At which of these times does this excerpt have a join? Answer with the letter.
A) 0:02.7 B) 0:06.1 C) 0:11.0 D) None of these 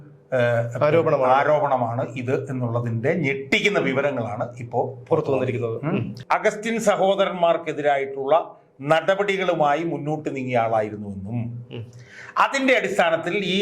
B